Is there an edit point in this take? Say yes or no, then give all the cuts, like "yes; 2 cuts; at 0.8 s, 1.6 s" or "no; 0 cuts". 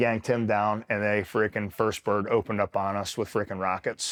no; 0 cuts